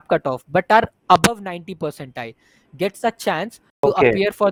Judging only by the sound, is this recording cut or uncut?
uncut